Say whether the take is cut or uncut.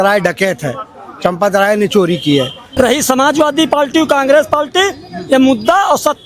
cut